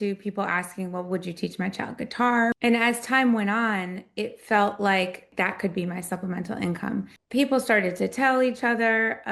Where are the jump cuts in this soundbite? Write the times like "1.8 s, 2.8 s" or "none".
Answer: 2.5 s, 5.3 s, 7.2 s